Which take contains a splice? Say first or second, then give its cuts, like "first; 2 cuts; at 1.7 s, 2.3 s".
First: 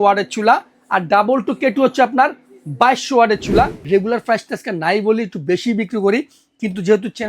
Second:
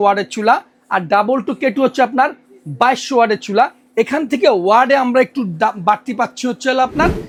first; 1 cut; at 3.8 s